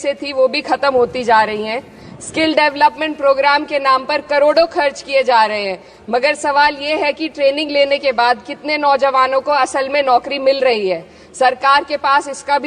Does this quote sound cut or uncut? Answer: uncut